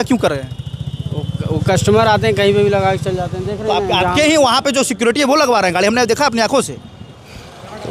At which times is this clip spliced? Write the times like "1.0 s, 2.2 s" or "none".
none